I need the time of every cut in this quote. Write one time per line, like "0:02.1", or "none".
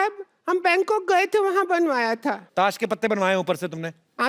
0:02.4